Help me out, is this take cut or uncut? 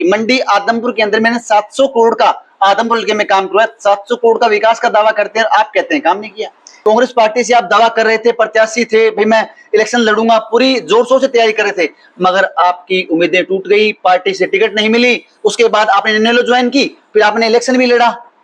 cut